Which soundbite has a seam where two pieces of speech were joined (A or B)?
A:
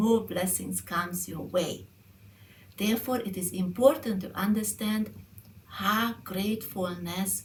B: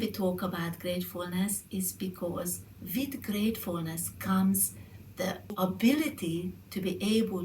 B